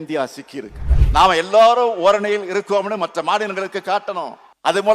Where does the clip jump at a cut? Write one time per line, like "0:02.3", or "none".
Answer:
0:00.9